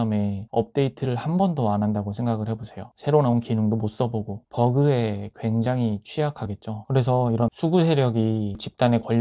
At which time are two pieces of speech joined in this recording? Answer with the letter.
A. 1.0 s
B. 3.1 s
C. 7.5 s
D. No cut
D